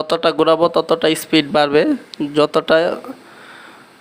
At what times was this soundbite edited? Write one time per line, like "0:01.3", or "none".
none